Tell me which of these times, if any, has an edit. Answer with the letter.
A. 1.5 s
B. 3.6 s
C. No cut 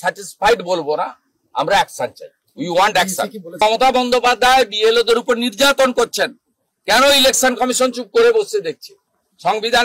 B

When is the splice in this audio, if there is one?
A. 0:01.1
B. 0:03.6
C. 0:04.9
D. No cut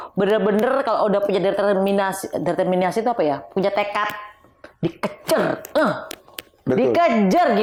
D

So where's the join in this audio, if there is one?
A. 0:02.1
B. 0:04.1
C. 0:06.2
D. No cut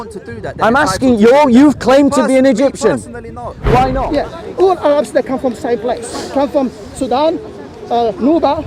B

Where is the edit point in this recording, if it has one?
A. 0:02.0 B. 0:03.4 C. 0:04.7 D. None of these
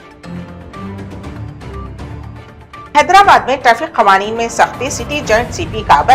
A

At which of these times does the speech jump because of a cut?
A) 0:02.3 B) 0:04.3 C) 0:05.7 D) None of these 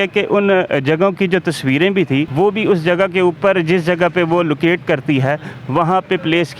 A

